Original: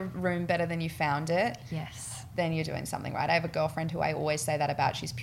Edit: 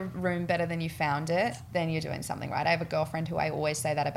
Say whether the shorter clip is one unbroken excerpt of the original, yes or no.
no